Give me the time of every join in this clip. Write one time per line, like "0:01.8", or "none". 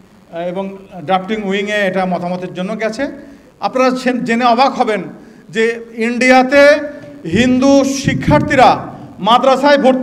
0:03.7